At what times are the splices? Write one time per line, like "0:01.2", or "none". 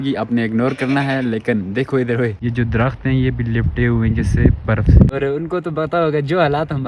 0:02.4
0:05.1